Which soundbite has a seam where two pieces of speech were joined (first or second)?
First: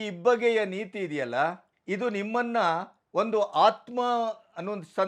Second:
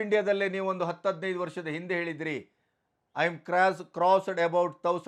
first